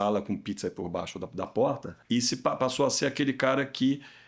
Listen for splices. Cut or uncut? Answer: cut